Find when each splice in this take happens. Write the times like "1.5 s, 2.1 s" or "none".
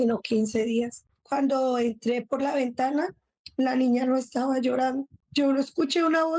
1.1 s, 5.2 s